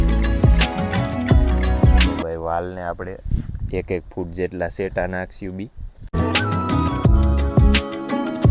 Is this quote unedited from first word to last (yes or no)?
yes